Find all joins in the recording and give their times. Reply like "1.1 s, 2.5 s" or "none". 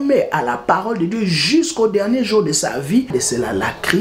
3.1 s